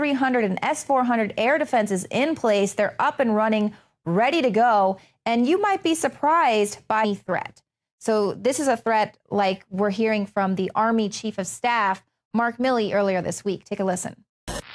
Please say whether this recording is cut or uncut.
uncut